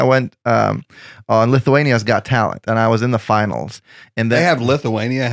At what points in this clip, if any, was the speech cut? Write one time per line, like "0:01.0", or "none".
0:04.4